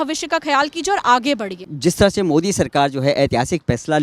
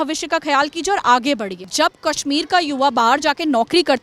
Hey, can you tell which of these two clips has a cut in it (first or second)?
second